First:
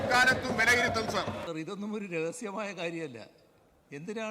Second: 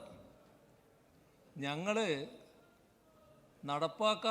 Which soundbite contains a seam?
first; 1 cut; at 1.4 s

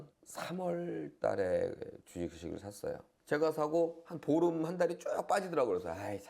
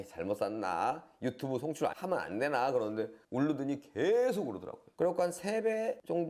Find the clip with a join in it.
first; 1 cut; at 3.1 s

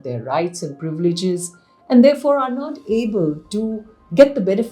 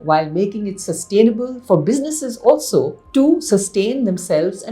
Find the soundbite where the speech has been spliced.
second; 1 cut; at 3.0 s

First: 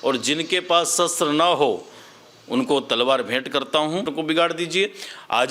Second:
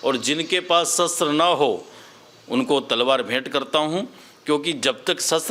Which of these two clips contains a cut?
first; 1 cut; at 4.1 s

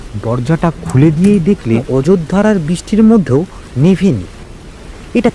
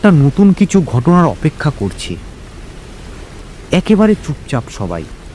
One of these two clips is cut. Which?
first; 1 cut; at 1.8 s

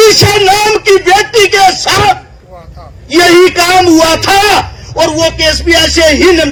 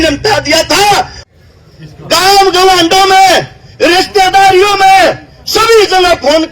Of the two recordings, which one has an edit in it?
second; 1 cut; at 1.2 s

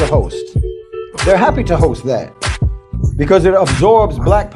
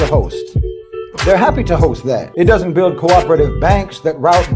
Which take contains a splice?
second; 1 cut; at 2.3 s

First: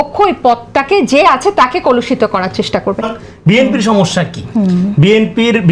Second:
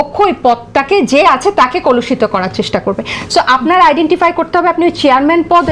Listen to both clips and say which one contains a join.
first; 1 cut; at 3.2 s

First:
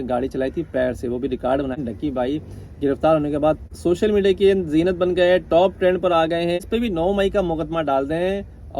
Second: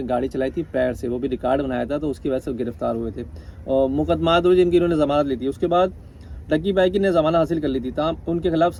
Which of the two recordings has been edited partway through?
first; 3 cuts; at 1.7 s, 3.6 s, 6.6 s

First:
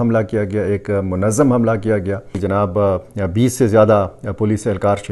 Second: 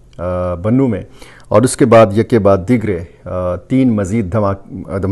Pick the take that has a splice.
first; 1 cut; at 2.2 s

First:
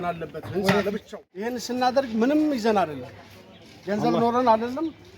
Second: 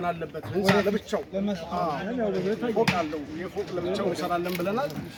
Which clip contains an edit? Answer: first; 1 cut; at 1.6 s

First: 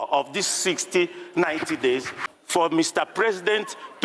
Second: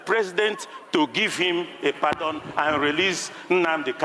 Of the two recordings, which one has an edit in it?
first; 1 cut; at 2.1 s

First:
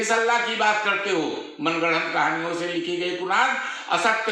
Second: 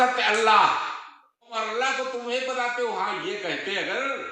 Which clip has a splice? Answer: second; 1 cut; at 1.5 s

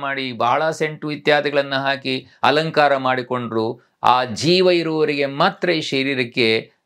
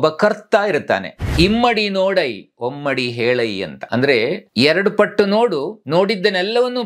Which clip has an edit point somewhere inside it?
second; 3 cuts; at 1.3 s, 4.1 s, 5.8 s

